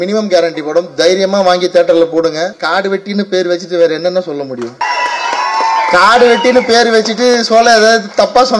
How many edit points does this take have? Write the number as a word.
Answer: two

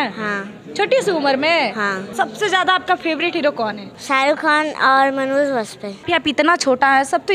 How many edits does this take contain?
three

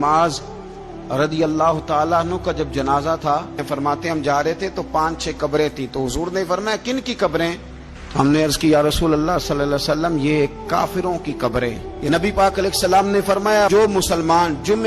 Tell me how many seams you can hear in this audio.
two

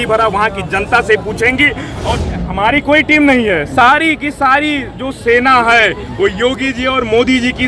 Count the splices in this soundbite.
one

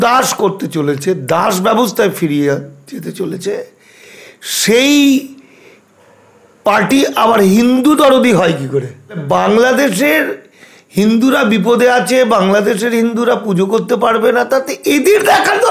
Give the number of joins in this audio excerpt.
one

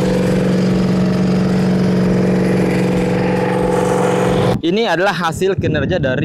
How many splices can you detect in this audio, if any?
one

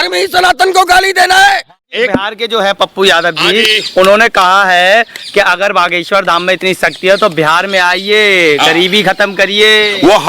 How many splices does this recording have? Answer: one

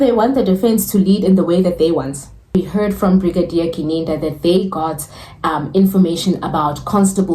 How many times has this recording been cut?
one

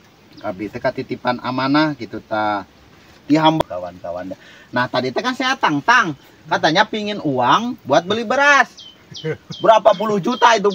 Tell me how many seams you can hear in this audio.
one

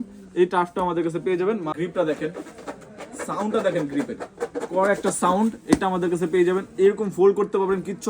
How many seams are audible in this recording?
one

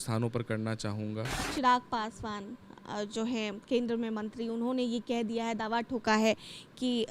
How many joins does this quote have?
one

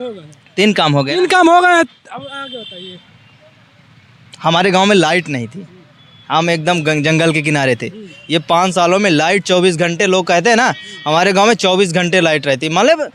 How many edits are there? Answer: zero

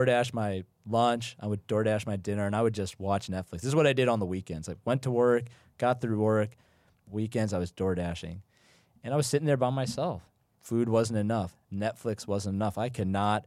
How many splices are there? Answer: one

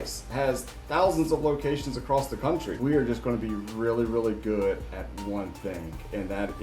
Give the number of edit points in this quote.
one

